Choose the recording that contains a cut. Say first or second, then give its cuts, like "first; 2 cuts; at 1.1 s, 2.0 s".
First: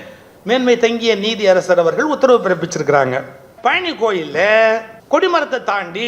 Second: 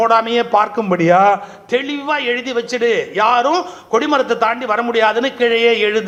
first; 2 cuts; at 3.5 s, 4.9 s